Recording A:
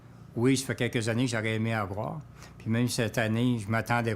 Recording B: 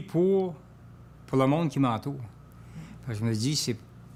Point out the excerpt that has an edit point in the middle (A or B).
A